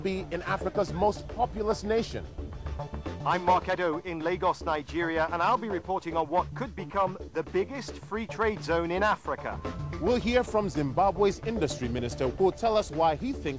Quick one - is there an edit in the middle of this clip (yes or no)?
no